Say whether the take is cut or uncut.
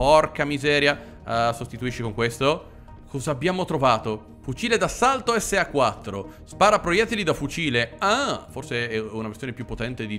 uncut